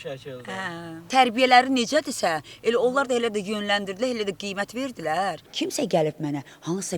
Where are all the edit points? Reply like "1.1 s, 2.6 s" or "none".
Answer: 1.1 s, 5.5 s